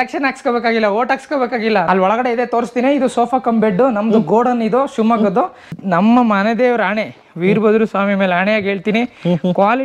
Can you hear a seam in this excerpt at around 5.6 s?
yes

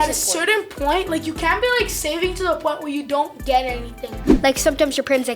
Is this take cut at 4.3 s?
yes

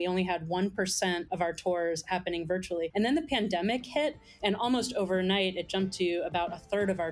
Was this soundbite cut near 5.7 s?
no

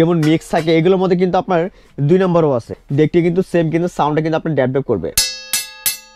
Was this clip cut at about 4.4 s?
no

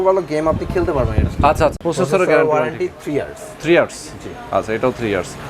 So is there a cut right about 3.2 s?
no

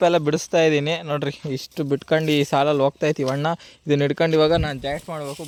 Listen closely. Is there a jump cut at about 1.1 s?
no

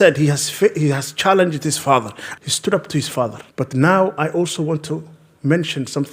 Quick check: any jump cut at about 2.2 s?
yes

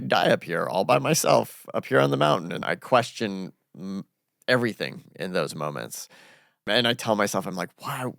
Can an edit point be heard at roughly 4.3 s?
no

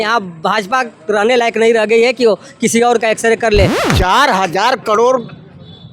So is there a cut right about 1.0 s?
no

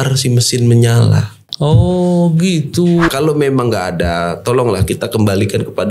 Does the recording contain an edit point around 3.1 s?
yes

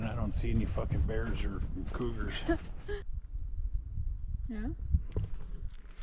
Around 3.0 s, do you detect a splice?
yes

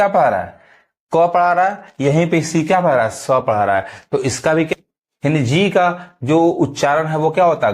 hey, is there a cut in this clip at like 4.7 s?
yes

